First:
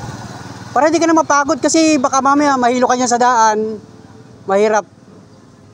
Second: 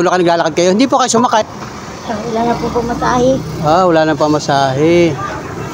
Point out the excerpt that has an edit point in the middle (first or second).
second